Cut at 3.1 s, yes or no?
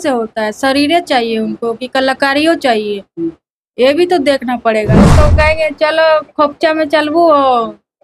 no